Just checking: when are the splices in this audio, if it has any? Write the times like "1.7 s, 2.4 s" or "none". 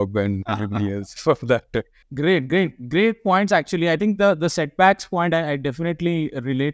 none